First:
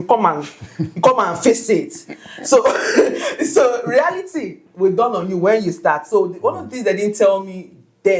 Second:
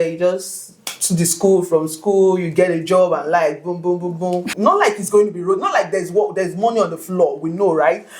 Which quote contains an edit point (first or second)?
second